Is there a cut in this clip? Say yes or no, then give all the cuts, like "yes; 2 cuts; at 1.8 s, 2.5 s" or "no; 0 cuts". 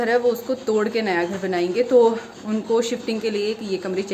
no; 0 cuts